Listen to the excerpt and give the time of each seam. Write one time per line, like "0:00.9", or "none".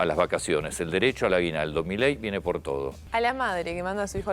0:03.0